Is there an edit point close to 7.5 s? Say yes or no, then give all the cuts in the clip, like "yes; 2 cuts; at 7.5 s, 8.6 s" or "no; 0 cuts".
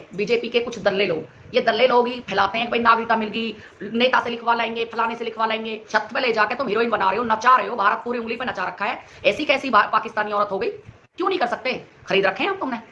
no; 2 cuts; at 5.8 s, 11.0 s